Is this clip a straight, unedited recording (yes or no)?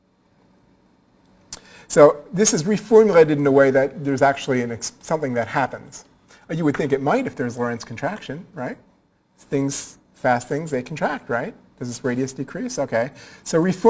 no